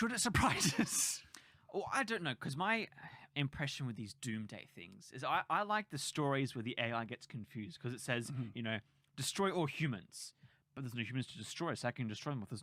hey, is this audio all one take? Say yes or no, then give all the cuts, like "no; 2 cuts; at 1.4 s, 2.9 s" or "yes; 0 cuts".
yes; 0 cuts